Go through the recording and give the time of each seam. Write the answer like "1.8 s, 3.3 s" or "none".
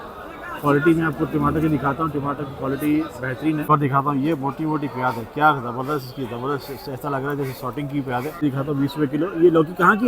3.7 s, 8.4 s